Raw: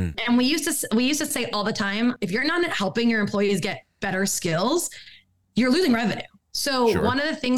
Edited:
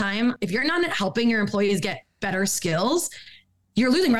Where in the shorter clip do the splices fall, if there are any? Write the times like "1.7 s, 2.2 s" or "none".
none